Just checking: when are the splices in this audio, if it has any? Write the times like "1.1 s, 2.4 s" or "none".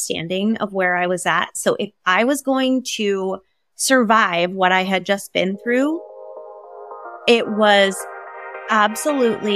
none